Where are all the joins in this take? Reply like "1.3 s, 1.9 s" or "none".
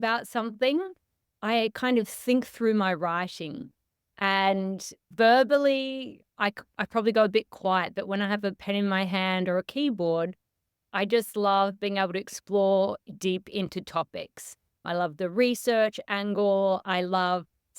5.0 s